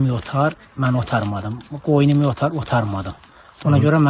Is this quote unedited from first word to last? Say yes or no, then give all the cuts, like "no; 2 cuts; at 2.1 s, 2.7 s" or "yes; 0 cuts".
yes; 0 cuts